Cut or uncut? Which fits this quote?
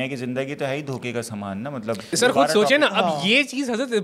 cut